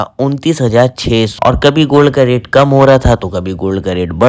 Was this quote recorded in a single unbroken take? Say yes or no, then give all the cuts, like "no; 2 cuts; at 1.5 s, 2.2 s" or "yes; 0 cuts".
yes; 0 cuts